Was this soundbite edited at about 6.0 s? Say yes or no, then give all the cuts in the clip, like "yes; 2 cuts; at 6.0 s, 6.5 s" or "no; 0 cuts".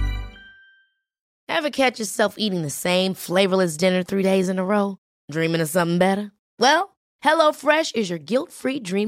no; 1 cut; at 1.2 s